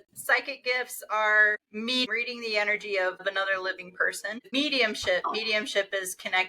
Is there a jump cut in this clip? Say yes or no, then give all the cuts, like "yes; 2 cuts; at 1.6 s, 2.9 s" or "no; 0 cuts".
yes; 3 cuts; at 2.0 s, 3.2 s, 4.5 s